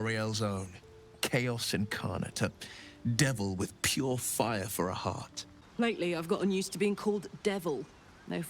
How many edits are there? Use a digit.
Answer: 1